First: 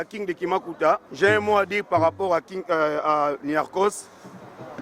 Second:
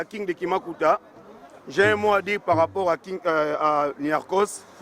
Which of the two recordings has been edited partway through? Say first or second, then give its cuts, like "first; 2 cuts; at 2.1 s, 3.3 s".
first; 1 cut; at 1.1 s